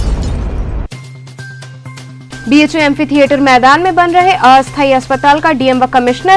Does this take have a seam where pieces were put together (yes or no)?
yes